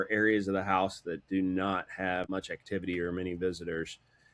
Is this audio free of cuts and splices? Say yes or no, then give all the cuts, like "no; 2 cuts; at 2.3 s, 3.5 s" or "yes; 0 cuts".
yes; 0 cuts